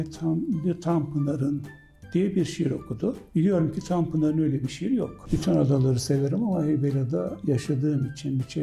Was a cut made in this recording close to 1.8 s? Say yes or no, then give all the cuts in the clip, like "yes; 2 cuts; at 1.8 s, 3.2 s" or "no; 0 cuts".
no; 1 cut; at 5.2 s